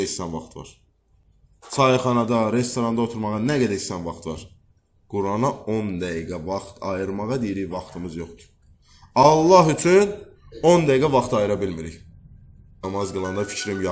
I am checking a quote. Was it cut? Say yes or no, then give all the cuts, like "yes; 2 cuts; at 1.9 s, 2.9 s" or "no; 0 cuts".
yes; 1 cut; at 12.8 s